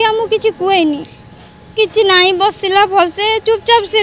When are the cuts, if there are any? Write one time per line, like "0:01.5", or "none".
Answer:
none